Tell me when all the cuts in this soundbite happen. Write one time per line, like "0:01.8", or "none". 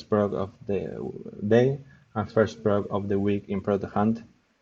none